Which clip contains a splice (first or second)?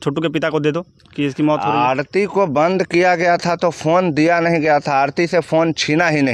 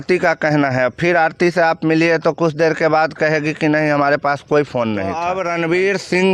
second